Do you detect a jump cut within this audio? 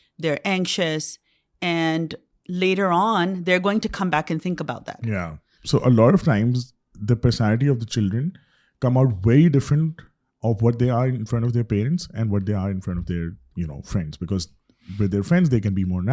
yes; 1 cut; at 5.6 s

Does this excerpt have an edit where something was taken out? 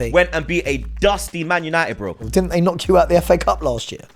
yes; 1 cut; at 2.2 s

